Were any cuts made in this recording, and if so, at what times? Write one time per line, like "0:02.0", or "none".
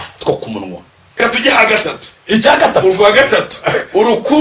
0:01.2